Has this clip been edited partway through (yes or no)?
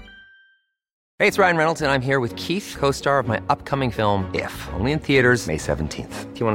yes